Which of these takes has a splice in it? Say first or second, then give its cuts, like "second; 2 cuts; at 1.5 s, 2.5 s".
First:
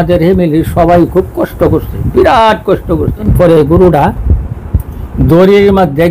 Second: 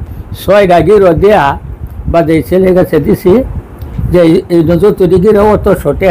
first; 1 cut; at 3.3 s